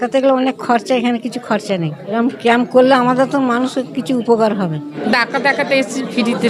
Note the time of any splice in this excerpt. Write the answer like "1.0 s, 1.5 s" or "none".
none